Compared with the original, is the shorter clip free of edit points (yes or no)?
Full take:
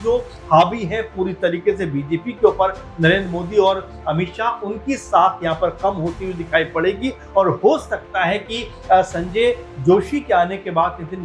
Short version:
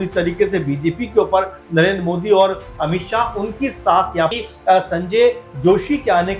no